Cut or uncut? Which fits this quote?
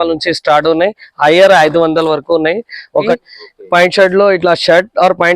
cut